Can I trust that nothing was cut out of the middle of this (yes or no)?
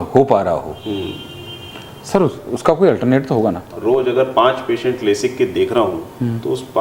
no